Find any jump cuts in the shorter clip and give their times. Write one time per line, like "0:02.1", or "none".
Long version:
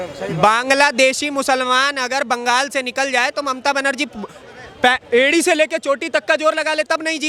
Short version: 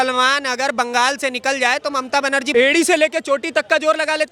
0:02.5